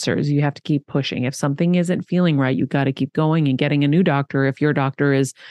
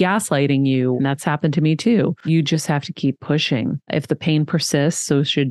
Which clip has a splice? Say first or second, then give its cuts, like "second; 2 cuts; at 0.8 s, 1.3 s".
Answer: second; 3 cuts; at 1.0 s, 2.2 s, 3.8 s